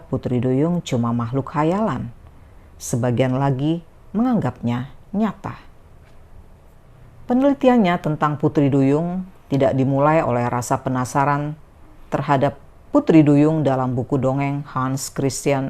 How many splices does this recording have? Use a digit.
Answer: 1